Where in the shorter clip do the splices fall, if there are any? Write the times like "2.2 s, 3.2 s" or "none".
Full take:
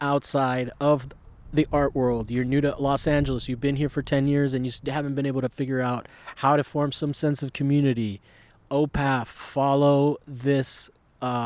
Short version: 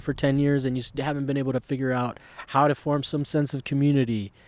none